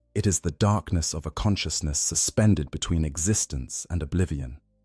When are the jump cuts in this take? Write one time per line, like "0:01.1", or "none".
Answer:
none